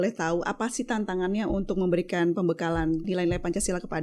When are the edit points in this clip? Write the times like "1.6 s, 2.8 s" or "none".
3.0 s